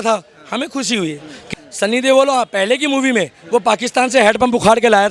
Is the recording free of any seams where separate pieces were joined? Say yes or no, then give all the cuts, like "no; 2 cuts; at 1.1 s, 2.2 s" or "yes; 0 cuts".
no; 1 cut; at 1.4 s